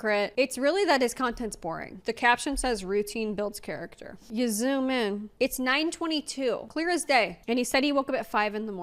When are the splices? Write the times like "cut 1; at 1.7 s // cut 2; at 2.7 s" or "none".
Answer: cut 1; at 2.0 s // cut 2; at 4.2 s // cut 3; at 5.3 s // cut 4; at 6.9 s